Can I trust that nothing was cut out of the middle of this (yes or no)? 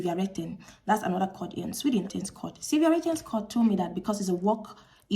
no